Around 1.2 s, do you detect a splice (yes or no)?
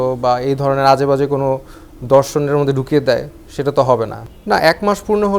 no